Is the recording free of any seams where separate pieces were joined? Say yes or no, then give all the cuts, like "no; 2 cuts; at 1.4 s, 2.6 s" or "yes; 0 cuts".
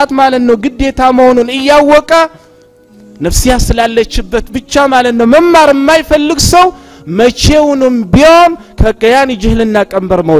yes; 0 cuts